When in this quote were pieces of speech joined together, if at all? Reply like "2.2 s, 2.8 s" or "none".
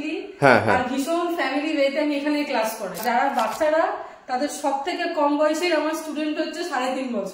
3.0 s